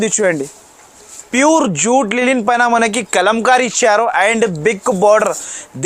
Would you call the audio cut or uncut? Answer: cut